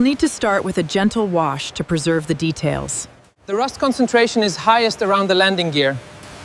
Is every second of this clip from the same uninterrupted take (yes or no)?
yes